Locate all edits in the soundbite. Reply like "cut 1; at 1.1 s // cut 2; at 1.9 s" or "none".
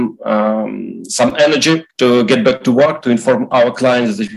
cut 1; at 1.9 s